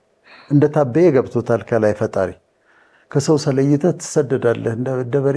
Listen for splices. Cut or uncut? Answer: uncut